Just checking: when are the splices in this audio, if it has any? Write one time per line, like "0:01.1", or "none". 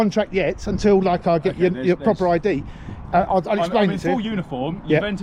none